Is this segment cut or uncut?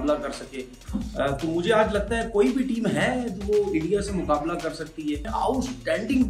cut